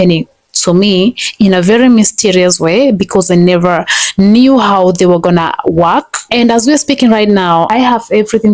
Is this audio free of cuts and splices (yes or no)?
no